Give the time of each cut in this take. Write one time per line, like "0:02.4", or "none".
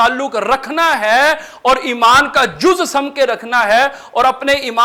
none